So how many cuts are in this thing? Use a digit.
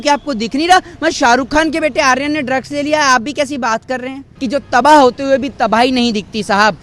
1